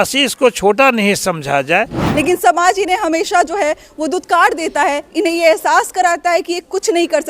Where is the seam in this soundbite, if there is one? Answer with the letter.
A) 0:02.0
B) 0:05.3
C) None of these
A